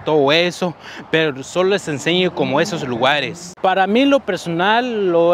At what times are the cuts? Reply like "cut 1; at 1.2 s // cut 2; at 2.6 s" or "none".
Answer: cut 1; at 3.4 s